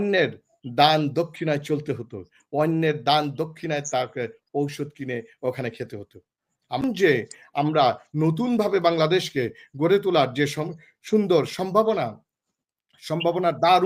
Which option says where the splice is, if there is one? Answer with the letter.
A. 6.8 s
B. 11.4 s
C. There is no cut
A